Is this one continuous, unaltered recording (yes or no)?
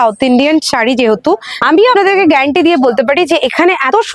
no